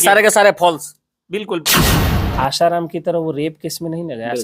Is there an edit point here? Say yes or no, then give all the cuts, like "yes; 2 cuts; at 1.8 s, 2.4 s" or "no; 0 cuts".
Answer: yes; 1 cut; at 2.0 s